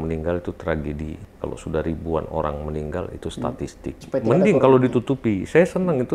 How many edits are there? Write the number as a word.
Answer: two